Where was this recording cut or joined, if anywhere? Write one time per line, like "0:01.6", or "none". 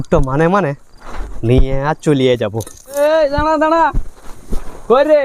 0:03.0